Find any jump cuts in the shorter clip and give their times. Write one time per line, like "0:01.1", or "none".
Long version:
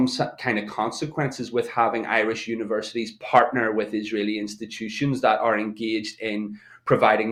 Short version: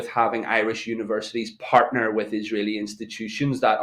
none